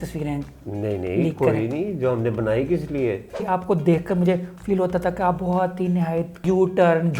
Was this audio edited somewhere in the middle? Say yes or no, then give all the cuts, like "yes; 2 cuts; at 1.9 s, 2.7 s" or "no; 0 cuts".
yes; 2 cuts; at 3.4 s, 6.4 s